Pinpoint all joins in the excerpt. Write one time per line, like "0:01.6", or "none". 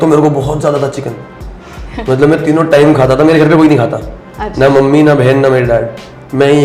none